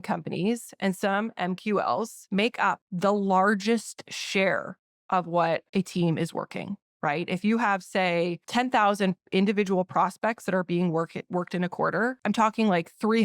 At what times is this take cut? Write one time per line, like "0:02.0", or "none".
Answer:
0:02.7
0:05.7
0:08.4
0:12.2